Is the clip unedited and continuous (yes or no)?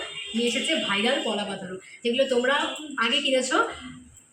yes